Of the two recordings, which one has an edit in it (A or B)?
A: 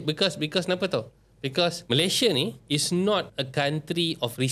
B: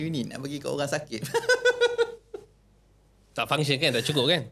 A